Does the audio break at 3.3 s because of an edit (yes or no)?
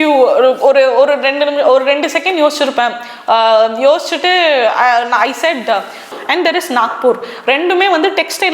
no